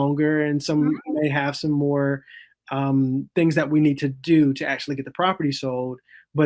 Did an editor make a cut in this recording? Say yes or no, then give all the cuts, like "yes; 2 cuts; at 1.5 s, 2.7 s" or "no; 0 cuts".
no; 0 cuts